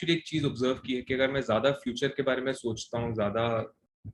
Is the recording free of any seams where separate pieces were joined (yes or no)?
yes